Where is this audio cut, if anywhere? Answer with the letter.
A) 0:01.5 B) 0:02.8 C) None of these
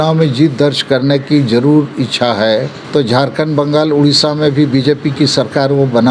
B